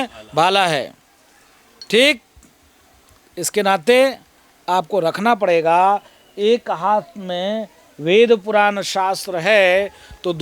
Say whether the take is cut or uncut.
uncut